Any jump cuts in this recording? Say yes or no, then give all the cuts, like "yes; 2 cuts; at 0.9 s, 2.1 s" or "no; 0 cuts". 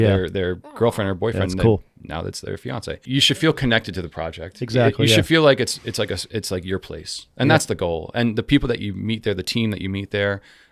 yes; 1 cut; at 3.0 s